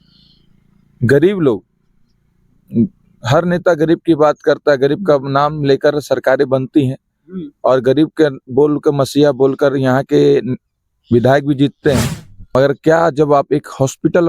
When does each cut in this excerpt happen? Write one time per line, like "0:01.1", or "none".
0:12.5